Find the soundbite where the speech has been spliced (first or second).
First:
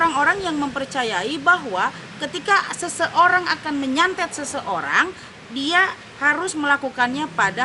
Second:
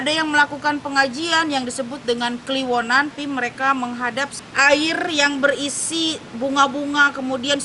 second